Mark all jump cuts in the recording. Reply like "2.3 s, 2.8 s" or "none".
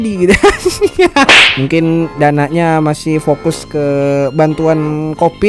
1.3 s